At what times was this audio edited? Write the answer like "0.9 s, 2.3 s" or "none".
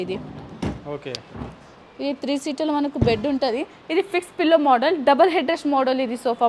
none